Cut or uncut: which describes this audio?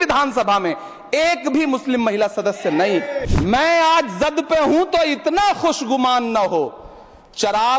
cut